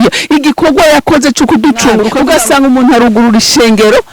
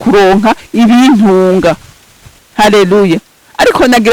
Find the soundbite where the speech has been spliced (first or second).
first